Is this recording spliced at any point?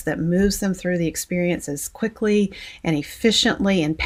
no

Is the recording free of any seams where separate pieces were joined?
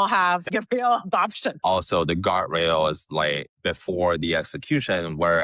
no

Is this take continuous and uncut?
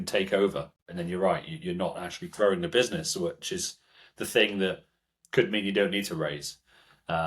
yes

